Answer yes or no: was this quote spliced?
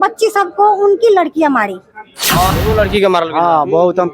yes